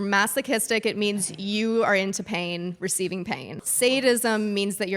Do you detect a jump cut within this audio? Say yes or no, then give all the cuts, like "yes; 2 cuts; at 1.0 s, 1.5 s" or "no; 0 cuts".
yes; 1 cut; at 3.6 s